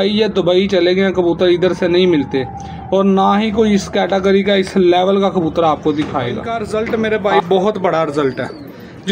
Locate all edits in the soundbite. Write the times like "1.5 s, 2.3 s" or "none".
6.5 s